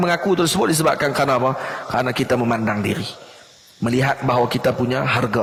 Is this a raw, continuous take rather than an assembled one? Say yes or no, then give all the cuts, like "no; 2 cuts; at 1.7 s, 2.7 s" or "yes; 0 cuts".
yes; 0 cuts